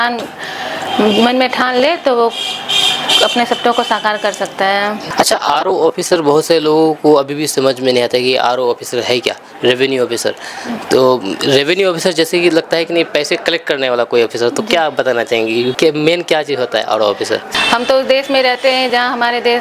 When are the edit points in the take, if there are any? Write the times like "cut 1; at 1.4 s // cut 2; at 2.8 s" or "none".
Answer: cut 1; at 5.0 s // cut 2; at 17.5 s